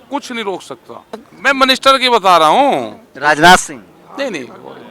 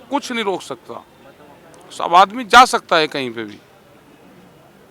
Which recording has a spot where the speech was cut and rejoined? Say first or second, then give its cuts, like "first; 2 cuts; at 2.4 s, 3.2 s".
first; 1 cut; at 1.3 s